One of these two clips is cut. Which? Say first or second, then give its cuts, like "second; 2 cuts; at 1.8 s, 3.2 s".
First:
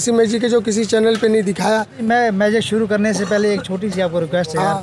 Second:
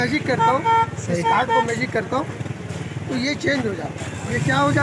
first; 1 cut; at 2.0 s